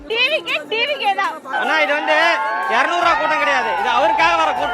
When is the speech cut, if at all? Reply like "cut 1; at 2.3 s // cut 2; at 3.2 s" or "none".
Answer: cut 1; at 1.5 s